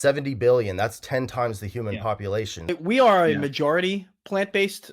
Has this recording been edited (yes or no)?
yes